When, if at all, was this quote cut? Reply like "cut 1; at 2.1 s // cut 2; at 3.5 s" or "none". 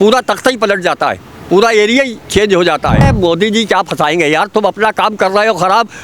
cut 1; at 3.1 s